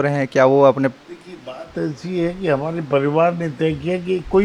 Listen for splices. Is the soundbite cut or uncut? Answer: uncut